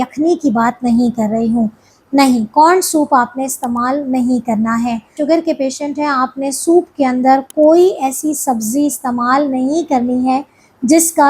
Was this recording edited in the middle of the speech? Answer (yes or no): yes